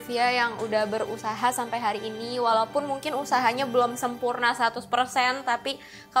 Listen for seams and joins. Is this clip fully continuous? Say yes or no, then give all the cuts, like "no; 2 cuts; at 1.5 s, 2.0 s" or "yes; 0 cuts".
yes; 0 cuts